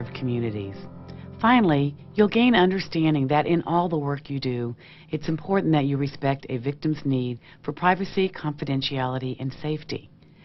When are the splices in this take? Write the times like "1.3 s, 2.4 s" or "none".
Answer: none